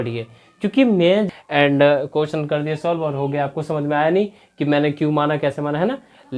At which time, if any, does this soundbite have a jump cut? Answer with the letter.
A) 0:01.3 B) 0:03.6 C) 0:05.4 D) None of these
A